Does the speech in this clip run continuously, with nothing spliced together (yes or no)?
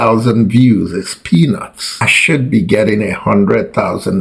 yes